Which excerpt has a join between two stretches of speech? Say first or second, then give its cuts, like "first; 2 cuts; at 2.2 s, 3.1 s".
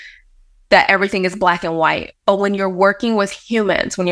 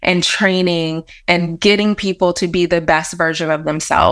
second; 1 cut; at 1.1 s